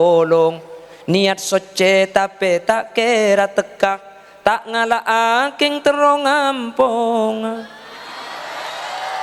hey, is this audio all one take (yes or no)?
yes